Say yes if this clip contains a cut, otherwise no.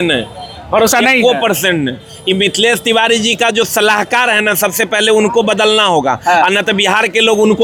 no